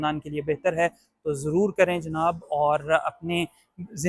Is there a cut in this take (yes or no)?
no